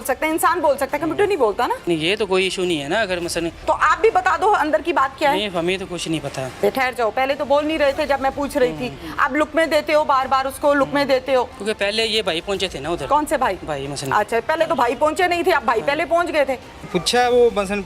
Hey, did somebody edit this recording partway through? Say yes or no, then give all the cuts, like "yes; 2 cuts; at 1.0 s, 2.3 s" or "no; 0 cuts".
yes; 5 cuts; at 1.9 s, 3.6 s, 6.6 s, 11.6 s, 16.8 s